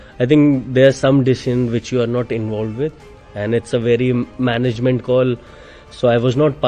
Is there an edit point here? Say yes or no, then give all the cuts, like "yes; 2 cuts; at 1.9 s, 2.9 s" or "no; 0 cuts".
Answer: no; 0 cuts